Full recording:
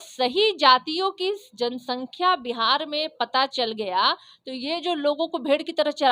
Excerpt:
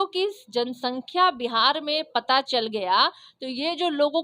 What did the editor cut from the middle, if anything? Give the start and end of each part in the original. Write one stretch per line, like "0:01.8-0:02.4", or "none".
none